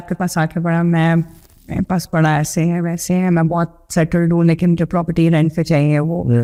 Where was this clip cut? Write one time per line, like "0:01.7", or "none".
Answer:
none